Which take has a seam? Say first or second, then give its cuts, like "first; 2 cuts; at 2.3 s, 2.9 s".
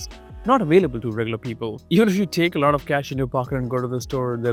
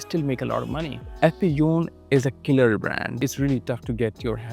second; 2 cuts; at 1.0 s, 3.2 s